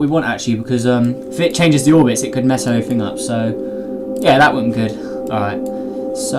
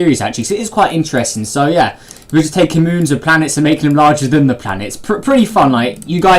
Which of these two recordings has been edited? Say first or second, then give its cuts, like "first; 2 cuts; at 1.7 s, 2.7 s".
second; 1 cut; at 1.2 s